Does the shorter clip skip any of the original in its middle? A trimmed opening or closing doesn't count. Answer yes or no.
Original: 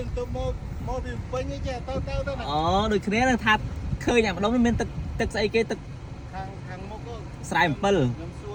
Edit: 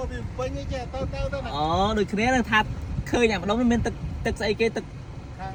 no